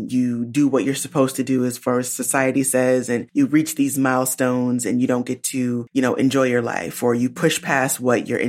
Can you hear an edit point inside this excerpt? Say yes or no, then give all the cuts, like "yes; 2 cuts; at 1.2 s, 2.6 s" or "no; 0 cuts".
yes; 2 cuts; at 3.3 s, 5.8 s